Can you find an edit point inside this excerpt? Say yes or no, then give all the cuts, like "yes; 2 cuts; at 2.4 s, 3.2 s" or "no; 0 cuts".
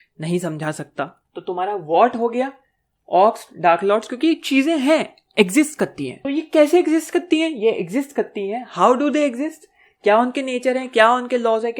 yes; 2 cuts; at 1.2 s, 6.1 s